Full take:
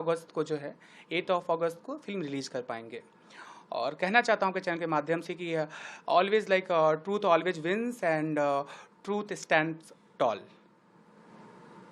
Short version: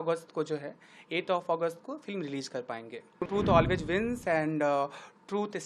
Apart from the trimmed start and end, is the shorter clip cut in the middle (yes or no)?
yes